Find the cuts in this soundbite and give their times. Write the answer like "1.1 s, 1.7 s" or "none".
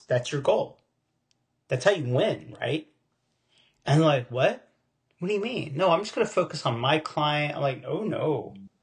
none